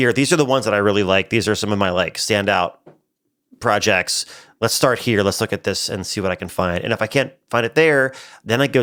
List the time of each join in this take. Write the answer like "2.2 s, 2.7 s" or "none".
none